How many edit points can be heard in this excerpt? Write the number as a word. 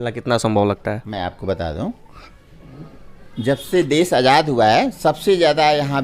zero